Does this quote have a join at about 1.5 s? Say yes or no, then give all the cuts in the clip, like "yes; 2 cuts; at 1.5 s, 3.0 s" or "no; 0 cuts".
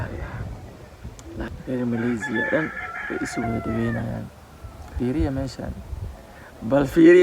yes; 2 cuts; at 1.5 s, 4.9 s